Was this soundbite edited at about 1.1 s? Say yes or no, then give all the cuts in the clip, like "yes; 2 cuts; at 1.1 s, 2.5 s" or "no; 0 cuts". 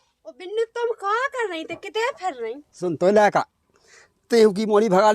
no; 1 cut; at 2.6 s